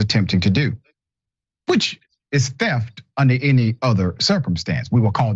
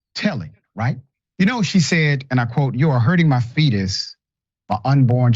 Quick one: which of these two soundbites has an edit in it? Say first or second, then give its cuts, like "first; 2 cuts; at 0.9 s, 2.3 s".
second; 1 cut; at 1.1 s